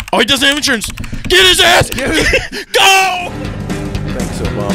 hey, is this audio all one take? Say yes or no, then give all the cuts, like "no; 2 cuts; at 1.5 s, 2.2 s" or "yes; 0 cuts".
no; 1 cut; at 3.2 s